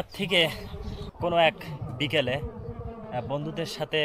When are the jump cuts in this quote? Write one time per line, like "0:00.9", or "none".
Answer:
0:01.1